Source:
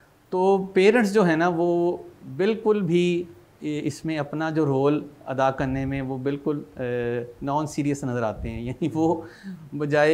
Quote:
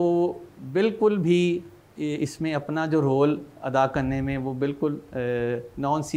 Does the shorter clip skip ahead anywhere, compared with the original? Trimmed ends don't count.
no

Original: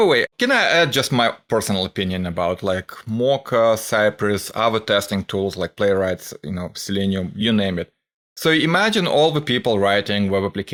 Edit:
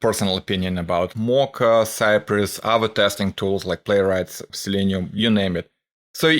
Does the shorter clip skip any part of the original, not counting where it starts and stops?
yes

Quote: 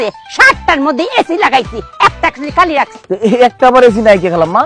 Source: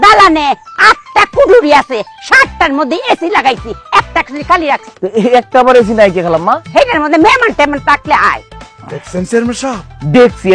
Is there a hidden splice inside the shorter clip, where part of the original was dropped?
no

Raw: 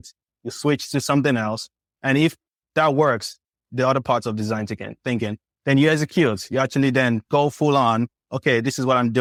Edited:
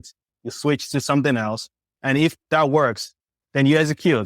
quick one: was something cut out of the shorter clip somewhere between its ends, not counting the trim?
yes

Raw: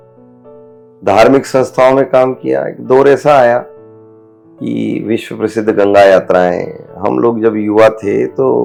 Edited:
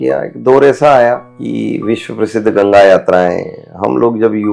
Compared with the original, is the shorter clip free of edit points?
no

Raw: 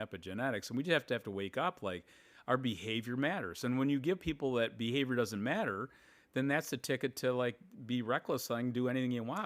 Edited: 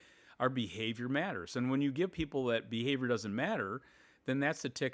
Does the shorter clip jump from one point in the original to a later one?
no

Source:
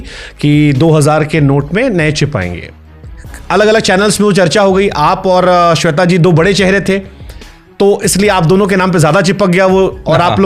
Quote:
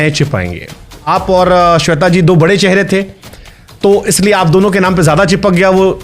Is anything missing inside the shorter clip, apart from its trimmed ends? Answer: yes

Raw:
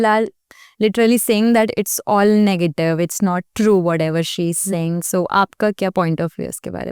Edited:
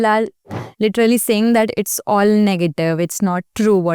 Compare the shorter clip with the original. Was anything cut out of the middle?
no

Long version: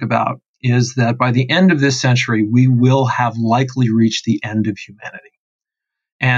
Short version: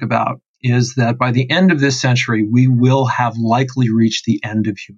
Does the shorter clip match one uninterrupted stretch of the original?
yes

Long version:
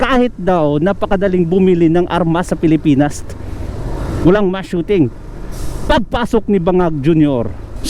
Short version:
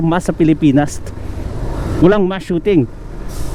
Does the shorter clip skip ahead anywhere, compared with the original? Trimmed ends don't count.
no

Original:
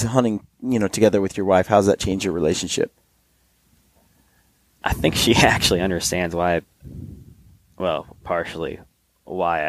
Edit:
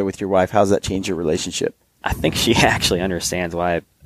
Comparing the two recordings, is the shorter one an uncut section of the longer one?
no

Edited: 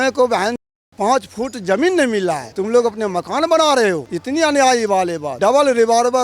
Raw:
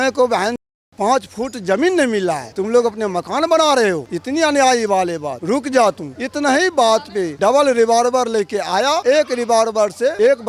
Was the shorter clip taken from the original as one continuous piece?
no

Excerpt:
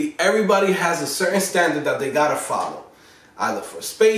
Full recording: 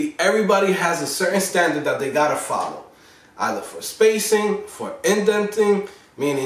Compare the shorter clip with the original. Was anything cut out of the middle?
no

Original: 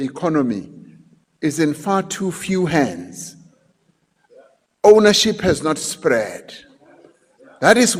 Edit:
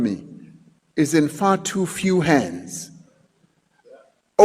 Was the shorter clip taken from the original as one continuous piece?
yes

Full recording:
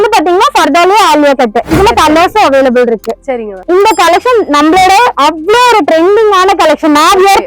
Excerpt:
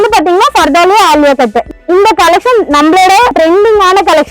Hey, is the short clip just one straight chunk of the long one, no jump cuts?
no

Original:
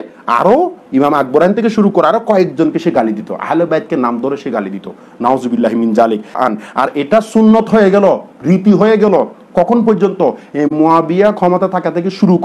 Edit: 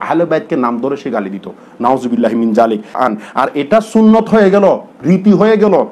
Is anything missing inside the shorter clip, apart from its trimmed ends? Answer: no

